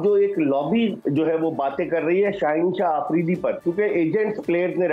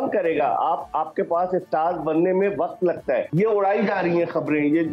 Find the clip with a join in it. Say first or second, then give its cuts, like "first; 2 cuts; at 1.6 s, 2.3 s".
second; 1 cut; at 3.3 s